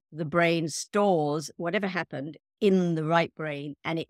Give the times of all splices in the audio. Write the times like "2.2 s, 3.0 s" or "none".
1.5 s